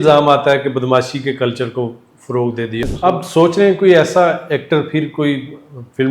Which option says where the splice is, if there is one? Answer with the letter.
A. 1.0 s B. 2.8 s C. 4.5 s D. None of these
B